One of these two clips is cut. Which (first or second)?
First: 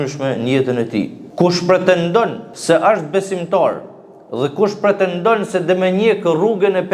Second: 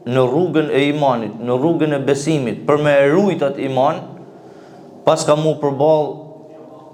first